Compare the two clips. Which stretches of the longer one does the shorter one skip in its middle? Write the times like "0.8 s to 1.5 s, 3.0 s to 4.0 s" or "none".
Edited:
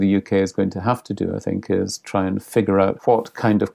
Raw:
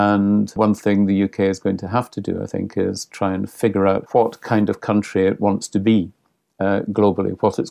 none